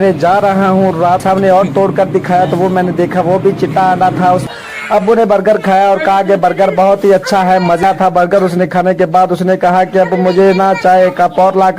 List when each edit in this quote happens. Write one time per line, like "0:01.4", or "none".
0:01.2
0:04.5
0:07.8